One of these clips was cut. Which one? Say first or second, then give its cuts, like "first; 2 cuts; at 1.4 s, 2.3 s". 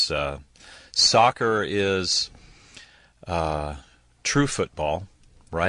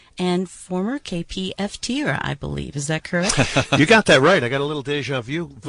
second; 1 cut; at 1.1 s